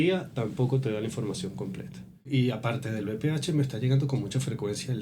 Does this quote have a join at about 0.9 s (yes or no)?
no